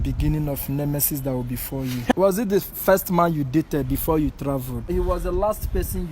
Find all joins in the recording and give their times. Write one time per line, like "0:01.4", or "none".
0:02.1
0:04.9